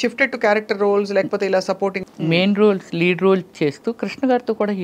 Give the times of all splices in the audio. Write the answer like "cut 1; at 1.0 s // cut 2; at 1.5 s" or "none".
cut 1; at 2.0 s